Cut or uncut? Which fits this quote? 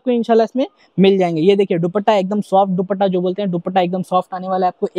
uncut